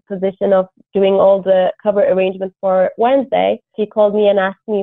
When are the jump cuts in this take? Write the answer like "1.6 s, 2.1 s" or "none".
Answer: 3.7 s